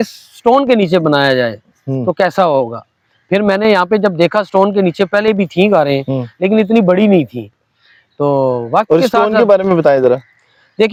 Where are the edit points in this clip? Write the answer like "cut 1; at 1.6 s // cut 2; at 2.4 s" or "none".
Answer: none